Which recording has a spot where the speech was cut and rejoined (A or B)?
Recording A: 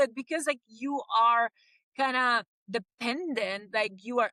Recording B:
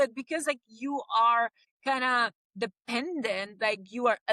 B